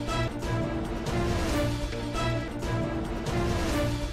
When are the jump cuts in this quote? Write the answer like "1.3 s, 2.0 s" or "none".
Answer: none